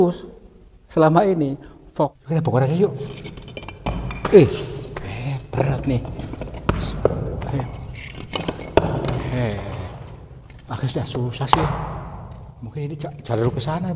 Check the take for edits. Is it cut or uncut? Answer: cut